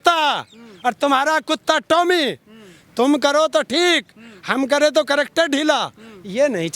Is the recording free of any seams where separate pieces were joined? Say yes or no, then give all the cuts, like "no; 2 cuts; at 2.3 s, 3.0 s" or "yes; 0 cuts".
yes; 0 cuts